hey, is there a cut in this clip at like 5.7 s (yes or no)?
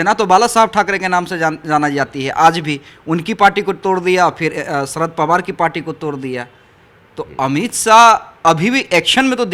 no